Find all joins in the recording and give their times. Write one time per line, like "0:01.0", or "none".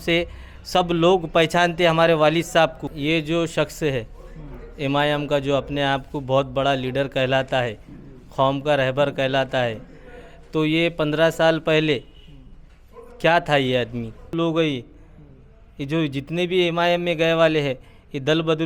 0:02.9
0:14.3